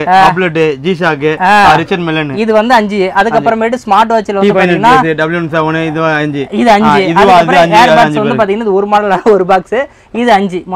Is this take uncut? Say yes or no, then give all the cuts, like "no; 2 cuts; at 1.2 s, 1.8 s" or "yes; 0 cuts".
yes; 0 cuts